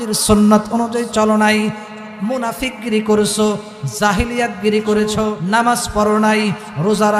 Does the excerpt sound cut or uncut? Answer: cut